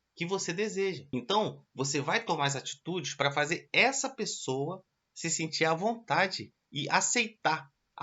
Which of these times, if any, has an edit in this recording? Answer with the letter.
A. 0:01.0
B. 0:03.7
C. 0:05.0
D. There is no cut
A